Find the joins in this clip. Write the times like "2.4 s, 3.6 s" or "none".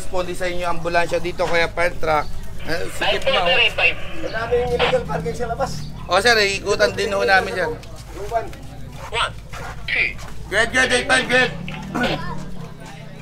none